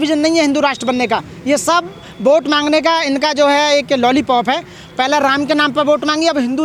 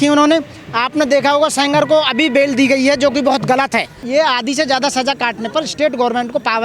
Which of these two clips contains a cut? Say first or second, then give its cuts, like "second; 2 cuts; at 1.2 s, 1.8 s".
second; 1 cut; at 4.1 s